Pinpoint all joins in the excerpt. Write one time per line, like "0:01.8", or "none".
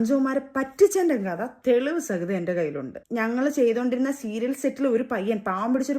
0:02.9